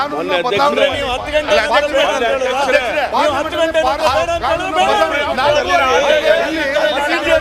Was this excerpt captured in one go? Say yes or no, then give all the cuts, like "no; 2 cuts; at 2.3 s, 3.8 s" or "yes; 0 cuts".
yes; 0 cuts